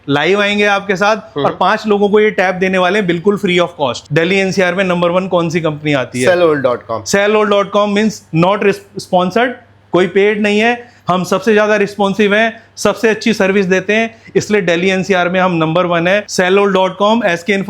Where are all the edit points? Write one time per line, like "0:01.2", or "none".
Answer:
0:04.0
0:16.3